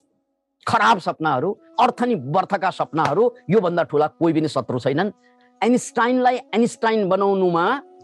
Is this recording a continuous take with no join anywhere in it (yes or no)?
no